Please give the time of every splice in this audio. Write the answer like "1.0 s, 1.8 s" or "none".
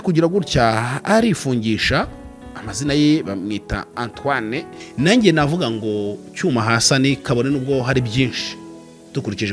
4.9 s

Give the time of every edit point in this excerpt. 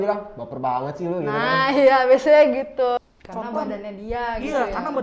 3.0 s

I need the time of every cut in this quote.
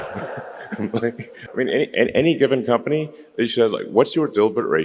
1.4 s

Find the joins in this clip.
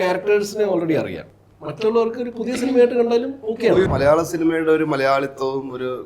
1.3 s, 3.9 s

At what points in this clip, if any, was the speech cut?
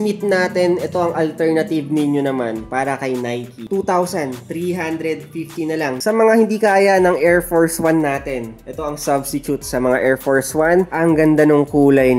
3.6 s, 6.0 s, 10.9 s

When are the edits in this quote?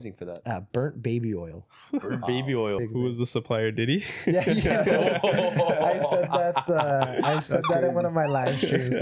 2.8 s

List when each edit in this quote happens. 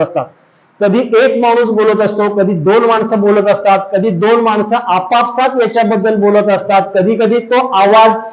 none

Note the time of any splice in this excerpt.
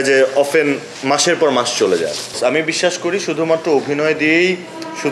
2.4 s

